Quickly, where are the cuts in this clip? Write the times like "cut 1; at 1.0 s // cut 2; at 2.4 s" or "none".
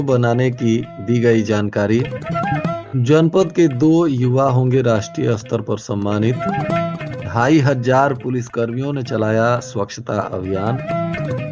none